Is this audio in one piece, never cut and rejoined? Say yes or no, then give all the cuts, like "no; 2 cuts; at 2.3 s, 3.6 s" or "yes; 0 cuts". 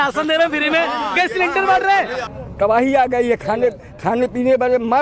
no; 1 cut; at 2.2 s